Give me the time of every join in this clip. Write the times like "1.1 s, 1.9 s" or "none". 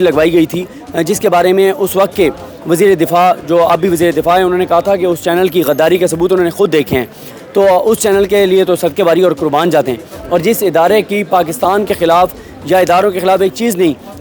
none

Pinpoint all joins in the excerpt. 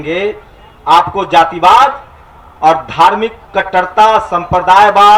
none

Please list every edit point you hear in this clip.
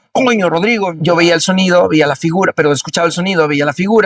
0.9 s

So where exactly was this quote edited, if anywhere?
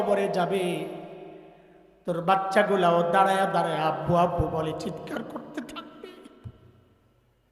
none

